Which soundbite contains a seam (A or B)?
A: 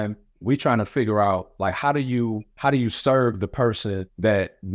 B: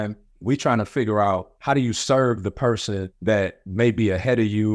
B